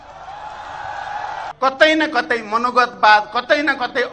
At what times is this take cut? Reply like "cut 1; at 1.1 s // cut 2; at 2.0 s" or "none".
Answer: cut 1; at 1.5 s